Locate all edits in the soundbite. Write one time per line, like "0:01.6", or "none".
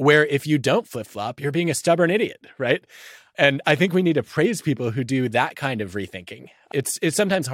0:01.2
0:03.3
0:06.6

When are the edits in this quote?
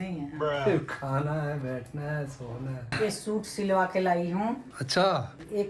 0:02.9

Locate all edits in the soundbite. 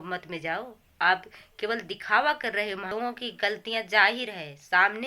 0:02.9

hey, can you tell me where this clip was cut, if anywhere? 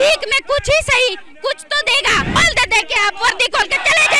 0:02.4

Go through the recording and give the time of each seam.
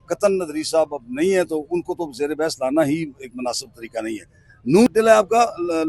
0:04.9

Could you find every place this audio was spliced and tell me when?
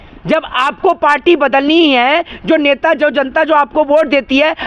none

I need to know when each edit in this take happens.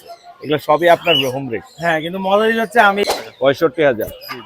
0:03.0

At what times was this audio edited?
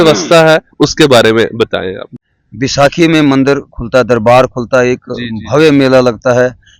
0:02.1

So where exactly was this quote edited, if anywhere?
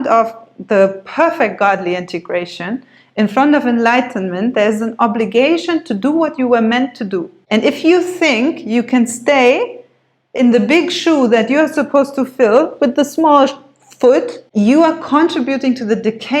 0:07.3
0:14.4

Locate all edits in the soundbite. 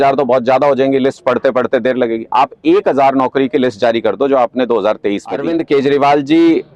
0:05.5

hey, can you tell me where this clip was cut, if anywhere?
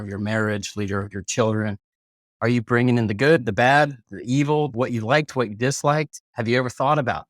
0:04.7

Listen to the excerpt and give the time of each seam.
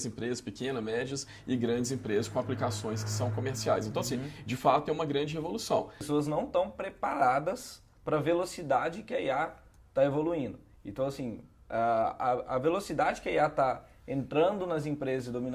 0:06.0

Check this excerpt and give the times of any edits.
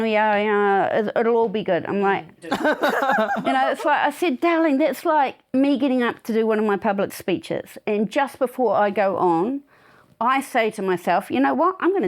0:02.5
0:05.5

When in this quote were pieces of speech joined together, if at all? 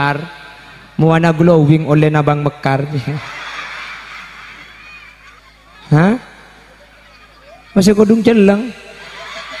0:05.4

